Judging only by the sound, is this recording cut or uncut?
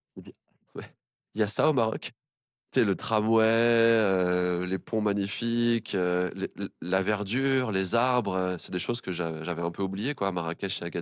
uncut